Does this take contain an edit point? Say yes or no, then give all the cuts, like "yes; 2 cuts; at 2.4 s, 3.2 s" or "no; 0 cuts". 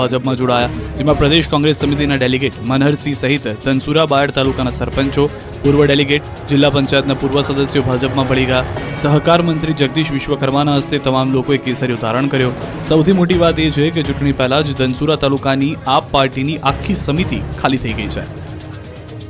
no; 0 cuts